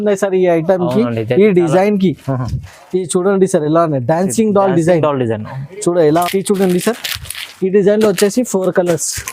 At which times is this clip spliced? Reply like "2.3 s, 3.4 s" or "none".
6.3 s

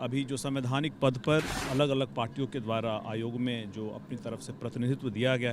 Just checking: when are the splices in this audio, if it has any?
1.6 s

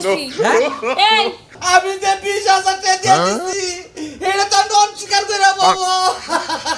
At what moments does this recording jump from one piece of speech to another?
1.5 s

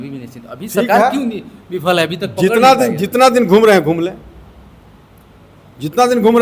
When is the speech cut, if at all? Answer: none

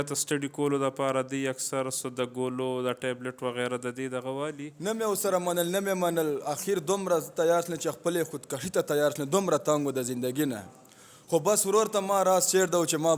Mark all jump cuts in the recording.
4.7 s

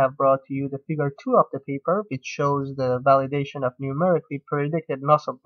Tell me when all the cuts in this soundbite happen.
none

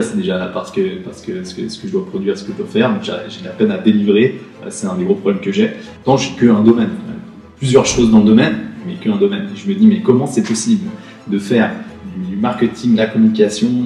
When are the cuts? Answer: 5.9 s

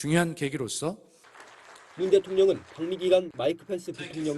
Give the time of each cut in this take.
0.9 s

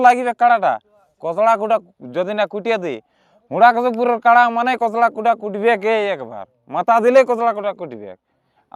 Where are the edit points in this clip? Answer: none

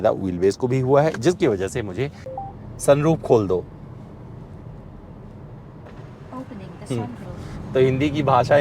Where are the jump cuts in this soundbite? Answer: 2.3 s

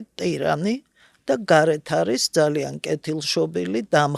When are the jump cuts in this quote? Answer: none

